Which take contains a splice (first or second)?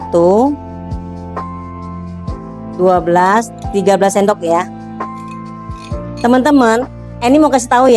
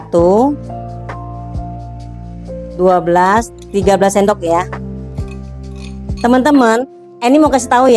first